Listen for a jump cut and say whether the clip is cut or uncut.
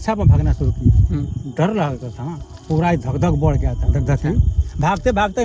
uncut